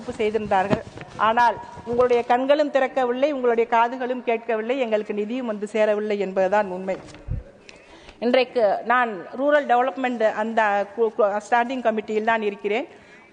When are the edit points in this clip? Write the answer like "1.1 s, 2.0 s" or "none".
none